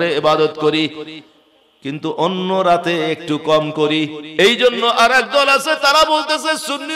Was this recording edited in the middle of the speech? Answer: yes; 1 cut; at 4.2 s

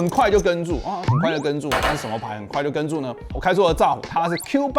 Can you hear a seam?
no; 0 cuts

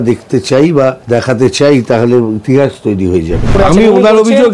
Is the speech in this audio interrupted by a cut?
yes; 2 cuts; at 1.0 s, 3.5 s

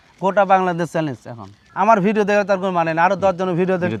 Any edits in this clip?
no; 0 cuts

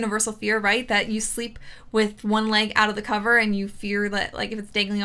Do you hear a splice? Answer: no; 0 cuts

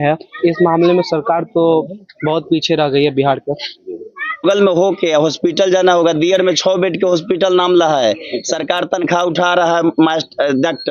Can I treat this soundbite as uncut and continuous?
no; 1 cut; at 4.4 s

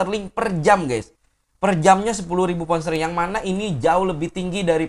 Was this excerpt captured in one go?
yes; 0 cuts

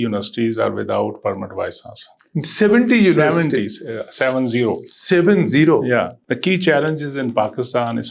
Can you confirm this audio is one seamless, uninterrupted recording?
no; 1 cut; at 6.2 s

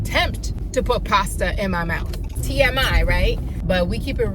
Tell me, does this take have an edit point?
yes; 2 cuts; at 2.3 s, 3.5 s

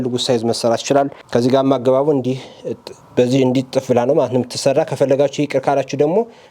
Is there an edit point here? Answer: yes; 1 cut; at 1.2 s

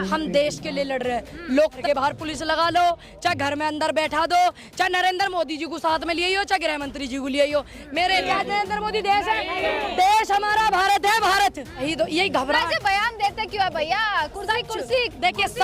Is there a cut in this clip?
yes; 3 cuts; at 1.8 s, 8.2 s, 11.9 s

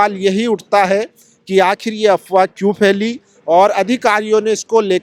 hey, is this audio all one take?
yes; 0 cuts

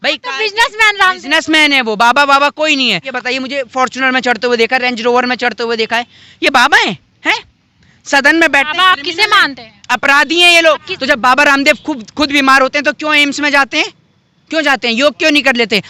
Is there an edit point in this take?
yes; 2 cuts; at 3.1 s, 10.9 s

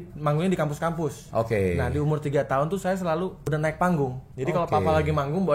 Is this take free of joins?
no; 3 cuts; at 1.2 s, 3.4 s, 4.3 s

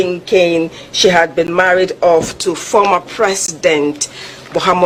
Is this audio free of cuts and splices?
yes; 0 cuts

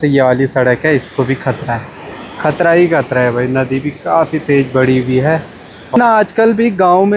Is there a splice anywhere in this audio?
yes; 1 cut; at 6.0 s

